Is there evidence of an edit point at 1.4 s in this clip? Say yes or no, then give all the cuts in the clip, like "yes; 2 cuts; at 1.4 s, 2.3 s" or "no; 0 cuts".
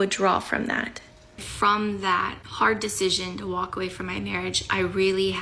yes; 1 cut; at 1.4 s